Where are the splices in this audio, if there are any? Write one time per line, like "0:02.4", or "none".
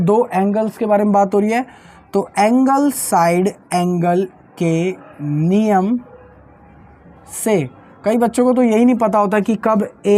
none